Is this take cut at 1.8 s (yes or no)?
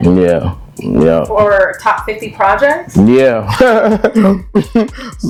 no